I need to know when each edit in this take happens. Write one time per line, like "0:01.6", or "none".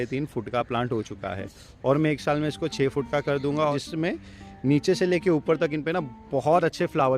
0:03.7